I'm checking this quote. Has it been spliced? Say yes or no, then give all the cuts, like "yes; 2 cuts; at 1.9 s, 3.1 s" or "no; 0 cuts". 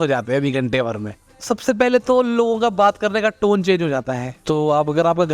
yes; 2 cuts; at 1.2 s, 4.3 s